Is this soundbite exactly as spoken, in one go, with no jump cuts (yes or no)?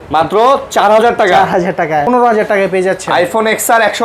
no